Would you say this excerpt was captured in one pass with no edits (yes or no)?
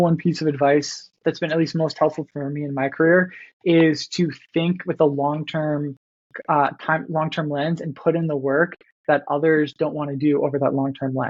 yes